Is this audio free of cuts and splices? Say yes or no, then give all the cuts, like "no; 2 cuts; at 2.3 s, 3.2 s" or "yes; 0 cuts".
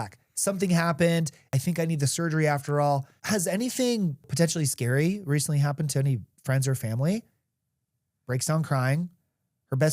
no; 3 cuts; at 1.5 s, 3.1 s, 4.3 s